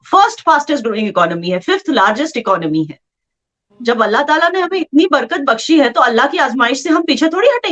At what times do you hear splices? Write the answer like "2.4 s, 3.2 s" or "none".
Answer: none